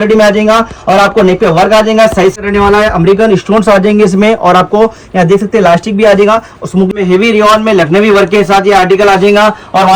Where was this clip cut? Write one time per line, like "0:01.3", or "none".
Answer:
0:02.4
0:06.9